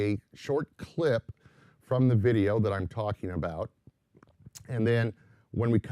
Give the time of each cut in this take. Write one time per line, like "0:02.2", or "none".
0:01.3